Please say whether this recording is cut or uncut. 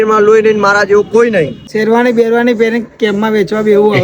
cut